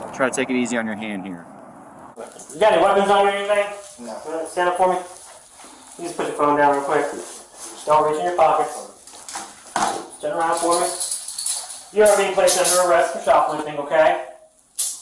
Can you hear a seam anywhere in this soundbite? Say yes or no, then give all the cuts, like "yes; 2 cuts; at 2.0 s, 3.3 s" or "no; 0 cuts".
yes; 1 cut; at 2.1 s